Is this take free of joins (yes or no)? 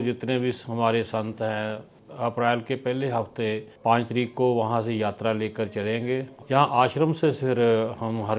no